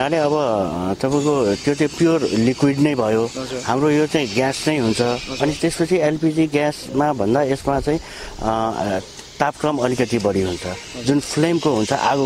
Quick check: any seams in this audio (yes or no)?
no